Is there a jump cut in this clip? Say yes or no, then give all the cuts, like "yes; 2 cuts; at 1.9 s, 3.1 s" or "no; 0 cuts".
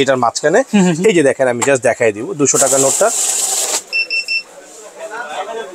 no; 0 cuts